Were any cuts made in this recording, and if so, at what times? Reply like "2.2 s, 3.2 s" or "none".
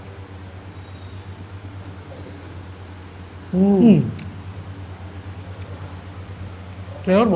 none